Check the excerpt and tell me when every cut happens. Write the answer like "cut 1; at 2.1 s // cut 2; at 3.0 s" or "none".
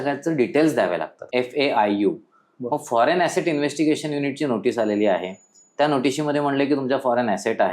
cut 1; at 1.2 s

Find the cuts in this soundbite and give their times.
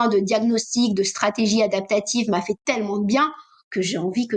none

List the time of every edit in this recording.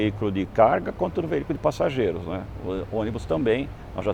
none

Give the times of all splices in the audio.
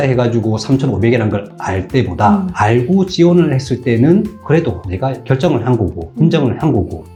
none

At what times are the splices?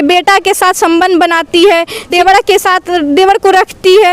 cut 1; at 2.1 s

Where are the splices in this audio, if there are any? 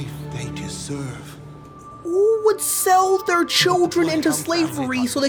none

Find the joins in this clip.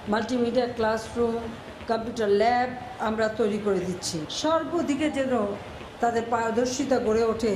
cut 1; at 4.2 s

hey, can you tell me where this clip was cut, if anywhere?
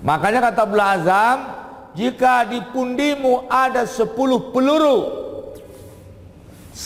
none

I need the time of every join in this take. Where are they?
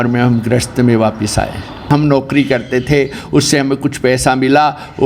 cut 1; at 1.9 s

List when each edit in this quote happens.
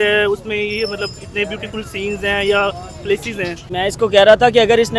cut 1; at 3.6 s

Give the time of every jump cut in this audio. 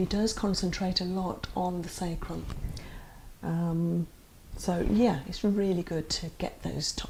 none

